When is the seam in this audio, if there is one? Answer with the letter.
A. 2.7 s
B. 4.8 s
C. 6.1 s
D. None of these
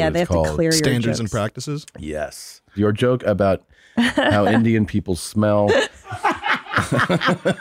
A